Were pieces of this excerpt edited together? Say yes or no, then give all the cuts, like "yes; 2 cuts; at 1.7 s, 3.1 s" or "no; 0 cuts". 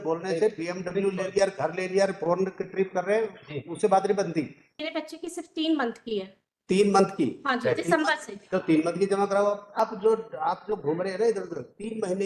yes; 2 cuts; at 4.9 s, 9.8 s